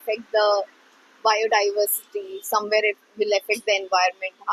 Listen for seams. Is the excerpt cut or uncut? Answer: uncut